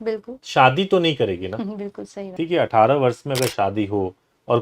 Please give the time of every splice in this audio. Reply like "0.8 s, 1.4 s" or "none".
2.4 s